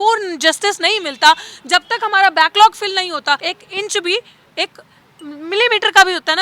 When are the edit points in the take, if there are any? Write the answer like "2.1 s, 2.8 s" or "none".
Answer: 3.5 s